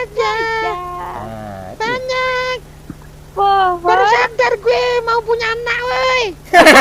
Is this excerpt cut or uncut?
uncut